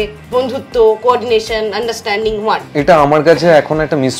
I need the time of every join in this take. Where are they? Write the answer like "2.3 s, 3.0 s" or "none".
2.7 s